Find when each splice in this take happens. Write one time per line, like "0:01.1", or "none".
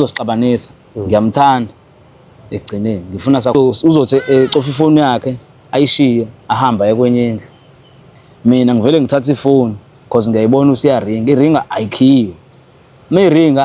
0:03.5